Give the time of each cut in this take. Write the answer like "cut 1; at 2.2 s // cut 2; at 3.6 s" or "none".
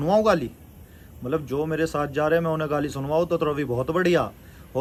none